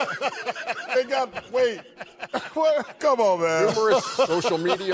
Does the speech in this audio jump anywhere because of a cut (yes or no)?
yes